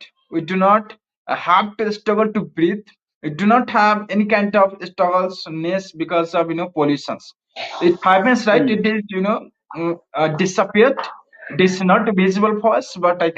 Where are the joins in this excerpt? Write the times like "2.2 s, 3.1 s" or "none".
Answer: none